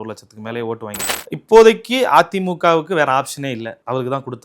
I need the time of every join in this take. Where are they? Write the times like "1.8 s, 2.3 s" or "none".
1.1 s